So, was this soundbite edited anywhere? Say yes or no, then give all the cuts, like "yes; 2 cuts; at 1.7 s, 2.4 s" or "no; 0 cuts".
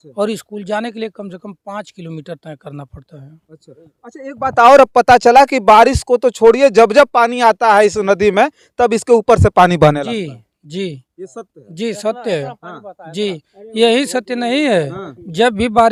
no; 0 cuts